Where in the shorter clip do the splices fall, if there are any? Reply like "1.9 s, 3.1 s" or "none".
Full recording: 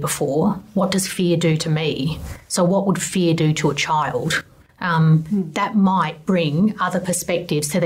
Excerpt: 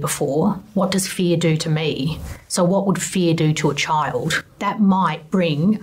4.6 s